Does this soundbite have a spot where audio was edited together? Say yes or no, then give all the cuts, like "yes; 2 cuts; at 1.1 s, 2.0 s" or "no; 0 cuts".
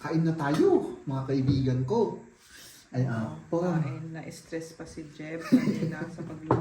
no; 0 cuts